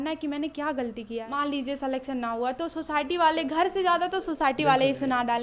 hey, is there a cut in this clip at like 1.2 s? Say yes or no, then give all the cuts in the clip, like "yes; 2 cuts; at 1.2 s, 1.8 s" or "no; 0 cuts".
yes; 1 cut; at 1.2 s